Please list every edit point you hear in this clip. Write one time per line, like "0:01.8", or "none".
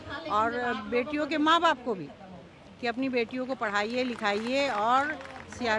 none